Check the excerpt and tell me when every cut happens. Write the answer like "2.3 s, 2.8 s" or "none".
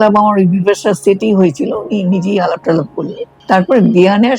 3.3 s